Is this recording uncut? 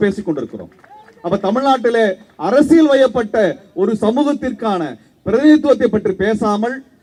yes; 0 cuts

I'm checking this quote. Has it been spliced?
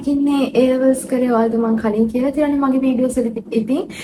no; 0 cuts

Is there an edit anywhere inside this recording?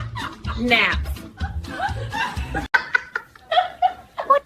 yes; 1 cut; at 2.7 s

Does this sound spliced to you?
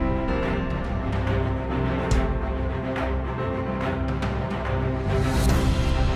no; 0 cuts

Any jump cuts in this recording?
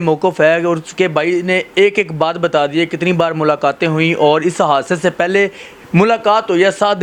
no; 0 cuts

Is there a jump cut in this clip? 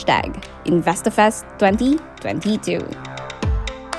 yes; 1 cut; at 3.1 s

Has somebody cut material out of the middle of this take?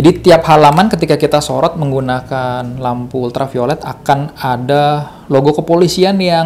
no; 0 cuts

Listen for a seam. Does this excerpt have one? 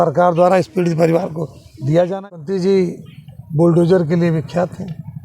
yes; 1 cut; at 2.3 s

